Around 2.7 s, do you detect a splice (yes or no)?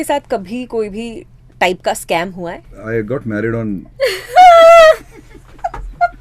yes